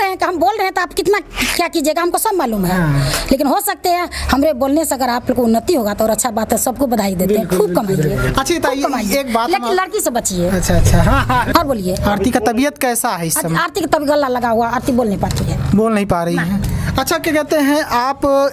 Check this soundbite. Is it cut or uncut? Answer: cut